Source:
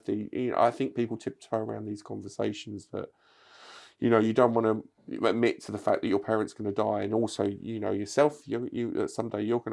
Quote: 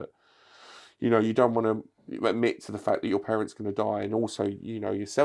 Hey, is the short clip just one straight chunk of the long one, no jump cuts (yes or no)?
yes